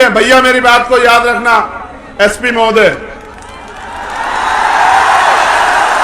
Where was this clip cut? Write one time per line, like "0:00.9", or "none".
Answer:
none